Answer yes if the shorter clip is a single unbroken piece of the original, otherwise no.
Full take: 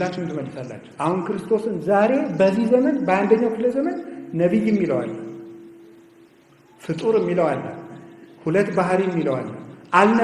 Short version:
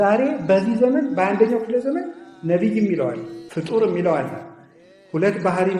no